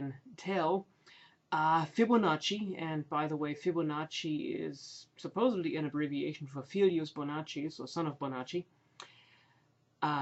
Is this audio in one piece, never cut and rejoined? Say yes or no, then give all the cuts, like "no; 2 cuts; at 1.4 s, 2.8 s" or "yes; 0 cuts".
yes; 0 cuts